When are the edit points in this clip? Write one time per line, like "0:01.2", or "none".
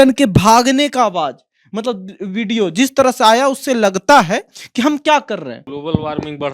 0:05.6